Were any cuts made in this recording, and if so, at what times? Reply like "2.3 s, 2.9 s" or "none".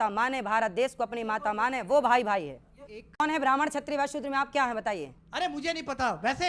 3.2 s